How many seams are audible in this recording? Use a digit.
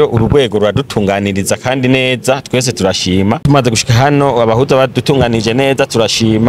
1